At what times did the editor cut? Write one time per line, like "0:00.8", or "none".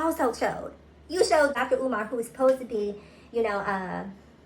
0:01.6